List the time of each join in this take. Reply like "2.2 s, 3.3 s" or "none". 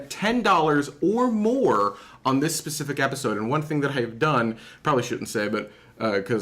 5.1 s